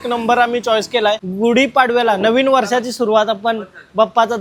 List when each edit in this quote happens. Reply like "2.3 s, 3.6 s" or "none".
none